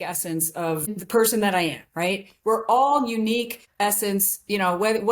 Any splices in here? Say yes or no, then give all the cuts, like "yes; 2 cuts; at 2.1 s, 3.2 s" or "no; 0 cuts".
yes; 2 cuts; at 1.0 s, 3.6 s